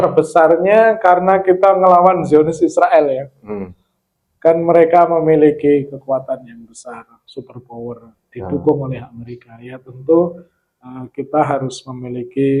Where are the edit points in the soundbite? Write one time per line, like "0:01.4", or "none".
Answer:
none